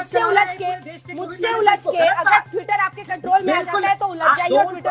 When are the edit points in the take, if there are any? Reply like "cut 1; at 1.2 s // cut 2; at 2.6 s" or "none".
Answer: none